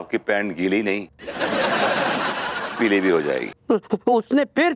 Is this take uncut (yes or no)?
no